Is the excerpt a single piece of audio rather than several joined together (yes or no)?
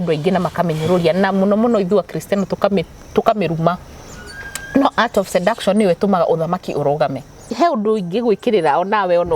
no